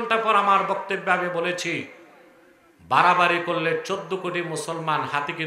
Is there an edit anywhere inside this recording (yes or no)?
no